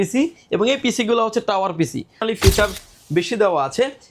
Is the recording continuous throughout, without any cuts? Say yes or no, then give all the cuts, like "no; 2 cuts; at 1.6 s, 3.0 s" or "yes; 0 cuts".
no; 1 cut; at 2.2 s